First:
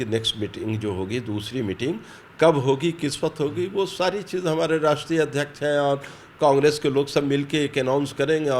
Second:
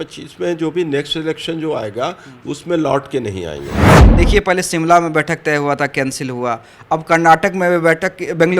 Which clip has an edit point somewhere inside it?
second; 1 cut; at 4.0 s

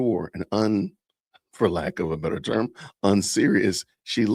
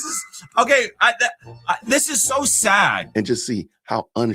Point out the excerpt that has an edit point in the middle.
second; 1 cut; at 3.0 s

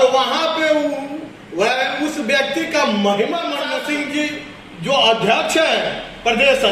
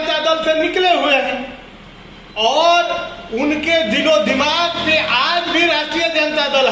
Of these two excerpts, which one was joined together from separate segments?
first; 1 cut; at 3.6 s

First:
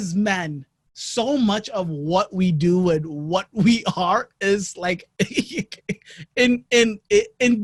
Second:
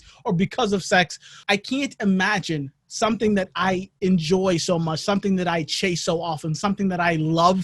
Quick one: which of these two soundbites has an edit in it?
second; 1 cut; at 1.3 s

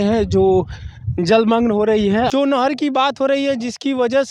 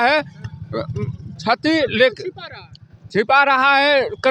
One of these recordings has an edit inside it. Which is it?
first; 1 cut; at 2.3 s

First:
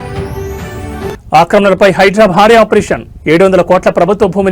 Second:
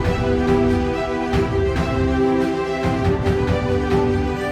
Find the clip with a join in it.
first; 1 cut; at 1.2 s

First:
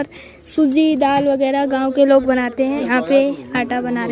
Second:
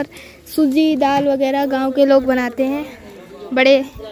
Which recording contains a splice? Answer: first; 1 cut; at 2.8 s

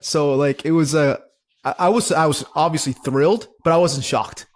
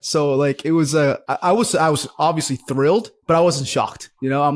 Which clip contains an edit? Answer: second; 1 cut; at 1.3 s

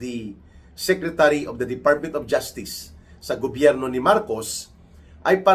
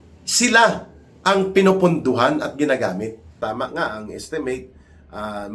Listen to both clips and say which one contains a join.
second; 1 cut; at 3.2 s

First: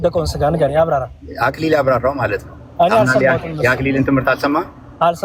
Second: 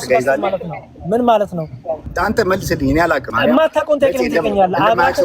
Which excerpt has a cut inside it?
second; 2 cuts; at 2.1 s, 3.4 s

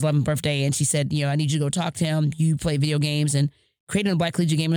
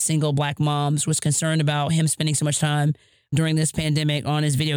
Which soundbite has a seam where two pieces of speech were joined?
second; 1 cut; at 3.3 s

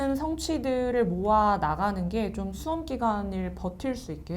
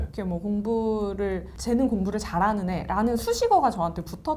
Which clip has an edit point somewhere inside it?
second; 1 cut; at 1.5 s

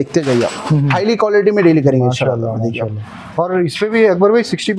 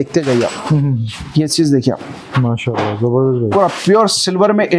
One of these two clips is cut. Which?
first; 1 cut; at 0.9 s

